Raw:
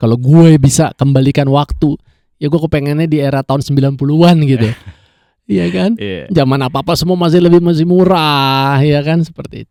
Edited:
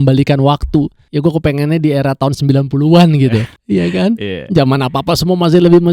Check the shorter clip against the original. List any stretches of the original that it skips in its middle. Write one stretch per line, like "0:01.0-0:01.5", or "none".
0:02.1-0:02.3
0:04.8-0:05.3